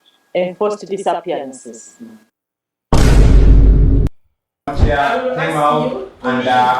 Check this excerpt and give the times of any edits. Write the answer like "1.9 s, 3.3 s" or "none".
4.7 s